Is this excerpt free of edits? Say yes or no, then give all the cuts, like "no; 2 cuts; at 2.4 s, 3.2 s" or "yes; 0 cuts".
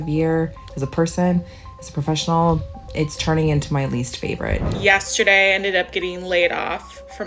no; 1 cut; at 4.7 s